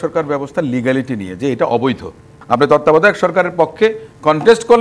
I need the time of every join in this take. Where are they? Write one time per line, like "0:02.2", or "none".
0:02.3